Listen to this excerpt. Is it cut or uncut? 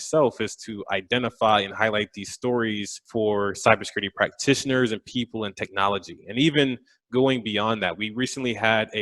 cut